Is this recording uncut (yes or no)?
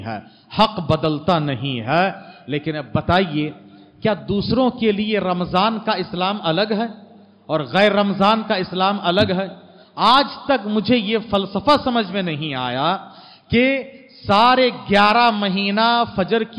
yes